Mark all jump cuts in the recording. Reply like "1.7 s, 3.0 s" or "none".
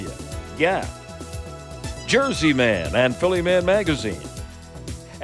none